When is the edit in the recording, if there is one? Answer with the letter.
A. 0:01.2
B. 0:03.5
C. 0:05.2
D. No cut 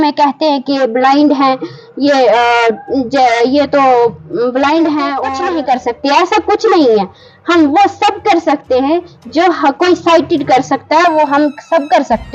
C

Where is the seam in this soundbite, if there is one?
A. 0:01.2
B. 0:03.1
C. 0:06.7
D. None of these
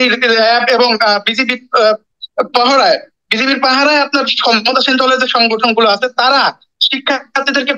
D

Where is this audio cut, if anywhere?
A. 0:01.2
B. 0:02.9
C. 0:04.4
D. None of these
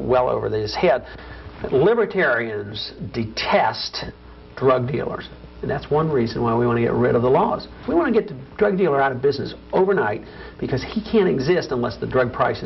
A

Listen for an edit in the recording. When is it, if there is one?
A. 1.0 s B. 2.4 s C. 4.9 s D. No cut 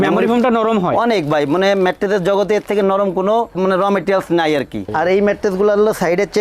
C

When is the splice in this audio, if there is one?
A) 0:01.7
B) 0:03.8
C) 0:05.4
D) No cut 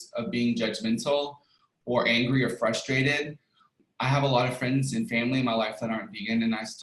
B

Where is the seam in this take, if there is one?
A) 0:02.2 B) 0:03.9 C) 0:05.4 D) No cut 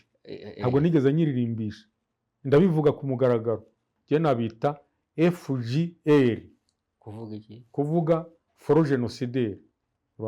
B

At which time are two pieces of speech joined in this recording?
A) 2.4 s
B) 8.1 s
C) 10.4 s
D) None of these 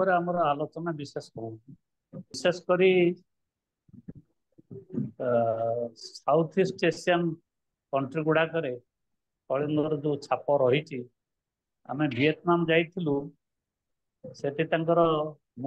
A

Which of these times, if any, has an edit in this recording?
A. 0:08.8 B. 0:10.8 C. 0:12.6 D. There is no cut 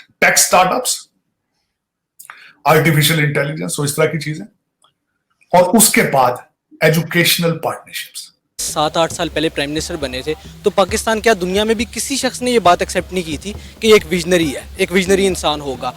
A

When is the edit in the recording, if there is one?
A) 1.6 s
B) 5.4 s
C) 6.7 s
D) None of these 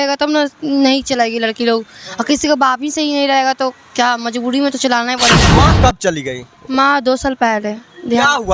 B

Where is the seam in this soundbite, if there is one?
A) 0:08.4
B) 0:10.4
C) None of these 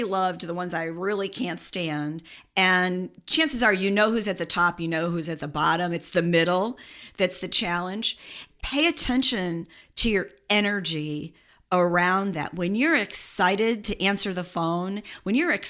A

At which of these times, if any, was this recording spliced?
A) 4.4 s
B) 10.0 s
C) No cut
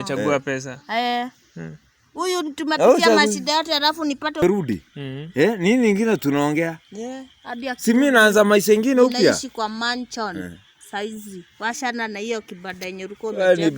A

